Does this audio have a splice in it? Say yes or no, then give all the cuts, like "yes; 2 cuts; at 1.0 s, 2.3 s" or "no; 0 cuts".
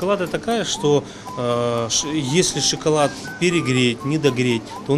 no; 0 cuts